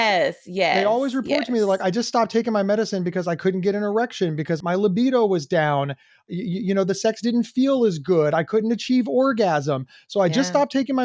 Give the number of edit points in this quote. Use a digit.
3